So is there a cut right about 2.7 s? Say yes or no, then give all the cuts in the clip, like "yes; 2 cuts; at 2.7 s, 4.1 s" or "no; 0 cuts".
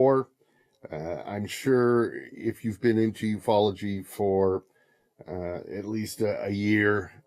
yes; 1 cut; at 2.7 s